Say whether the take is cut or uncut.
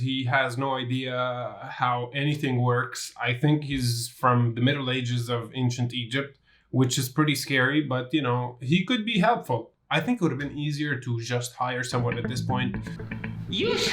cut